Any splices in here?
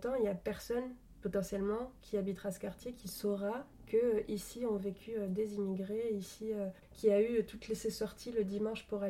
yes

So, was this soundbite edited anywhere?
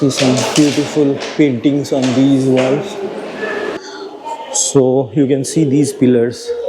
yes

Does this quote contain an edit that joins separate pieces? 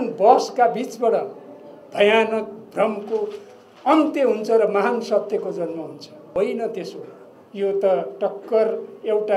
yes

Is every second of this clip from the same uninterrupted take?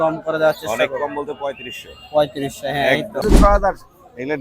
no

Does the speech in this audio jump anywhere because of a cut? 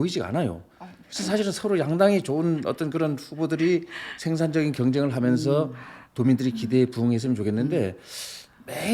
no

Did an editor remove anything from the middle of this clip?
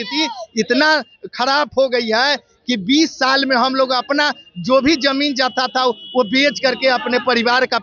no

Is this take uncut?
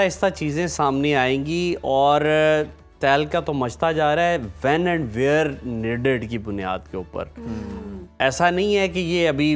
yes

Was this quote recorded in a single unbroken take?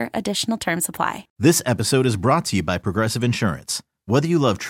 no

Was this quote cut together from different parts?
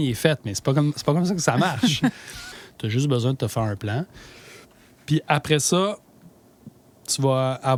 no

